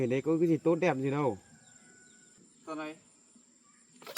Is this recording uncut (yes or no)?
no